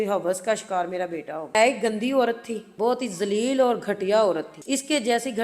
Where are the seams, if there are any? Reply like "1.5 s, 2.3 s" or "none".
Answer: 1.5 s, 2.7 s